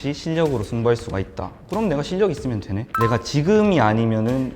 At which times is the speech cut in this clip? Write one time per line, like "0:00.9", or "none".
0:02.8